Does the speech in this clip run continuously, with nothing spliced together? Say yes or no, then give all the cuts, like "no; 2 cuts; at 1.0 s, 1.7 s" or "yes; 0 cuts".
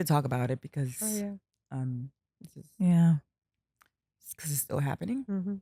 yes; 0 cuts